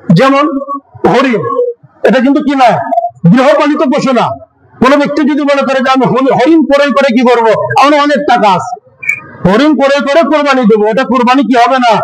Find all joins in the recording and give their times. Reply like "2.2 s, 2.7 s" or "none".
none